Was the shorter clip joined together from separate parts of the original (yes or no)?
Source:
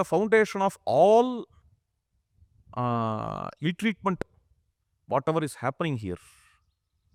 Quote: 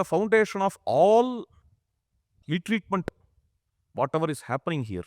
yes